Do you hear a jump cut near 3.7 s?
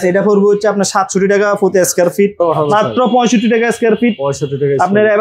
no; 1 cut; at 2.4 s

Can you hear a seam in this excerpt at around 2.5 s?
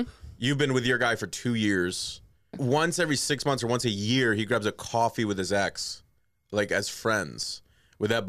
yes; 1 cut; at 2.5 s

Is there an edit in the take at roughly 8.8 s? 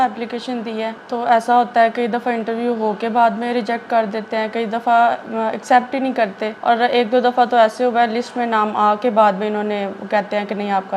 no; 2 cuts; at 1.0 s, 6.5 s

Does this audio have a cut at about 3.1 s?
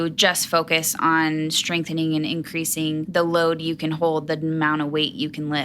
yes; 1 cut; at 3.1 s

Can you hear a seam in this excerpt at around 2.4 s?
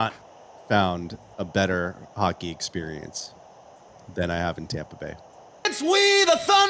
no; 1 cut; at 5.7 s

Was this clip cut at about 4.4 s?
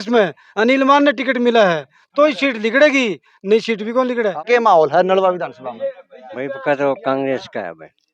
yes; 1 cut; at 4.4 s

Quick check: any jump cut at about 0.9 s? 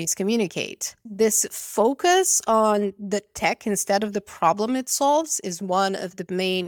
yes; 1 cut; at 0.9 s

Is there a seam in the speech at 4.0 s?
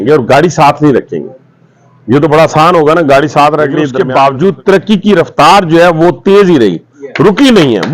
yes; 1 cut; at 4.0 s

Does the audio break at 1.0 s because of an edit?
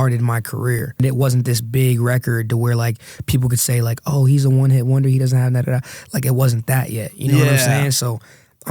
yes; 1 cut; at 1.0 s

